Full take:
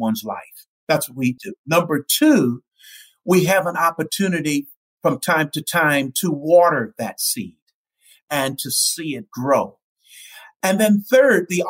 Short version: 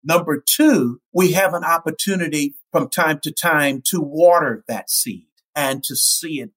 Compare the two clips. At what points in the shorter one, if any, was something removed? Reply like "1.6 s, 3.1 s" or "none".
1.0 s, 2.6 s, 5.3 s

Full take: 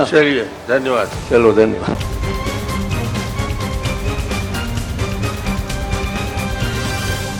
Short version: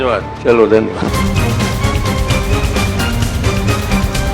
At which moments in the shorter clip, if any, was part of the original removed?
1.1 s

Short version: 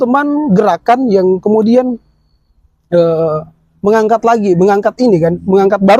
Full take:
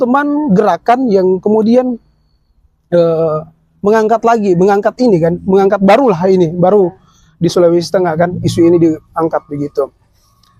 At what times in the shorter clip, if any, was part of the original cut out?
none

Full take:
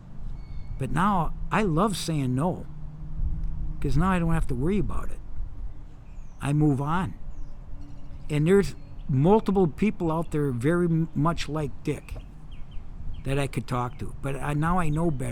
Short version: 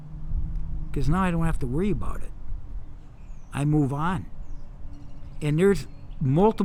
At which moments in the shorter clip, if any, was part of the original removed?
none

